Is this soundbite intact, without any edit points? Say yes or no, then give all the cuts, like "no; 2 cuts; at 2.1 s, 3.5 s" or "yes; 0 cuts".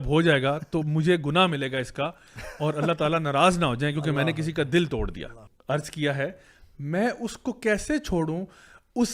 no; 1 cut; at 5.5 s